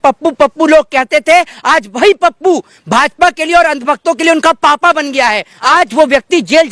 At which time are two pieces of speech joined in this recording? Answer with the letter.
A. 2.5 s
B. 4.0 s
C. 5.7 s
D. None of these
C